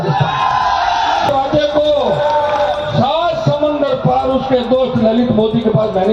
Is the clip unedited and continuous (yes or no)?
no